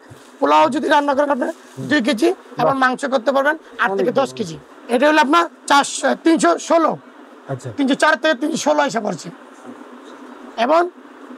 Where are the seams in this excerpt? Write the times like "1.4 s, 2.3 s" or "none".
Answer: 4.6 s